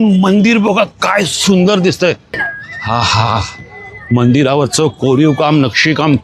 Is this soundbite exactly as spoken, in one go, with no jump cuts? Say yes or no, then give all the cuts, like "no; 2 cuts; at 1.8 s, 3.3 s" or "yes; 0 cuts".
no; 1 cut; at 2.3 s